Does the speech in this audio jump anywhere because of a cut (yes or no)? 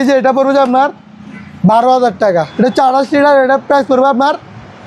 yes